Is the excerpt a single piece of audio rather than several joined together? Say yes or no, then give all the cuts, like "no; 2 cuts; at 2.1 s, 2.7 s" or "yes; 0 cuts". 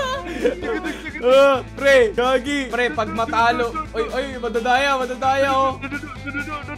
yes; 0 cuts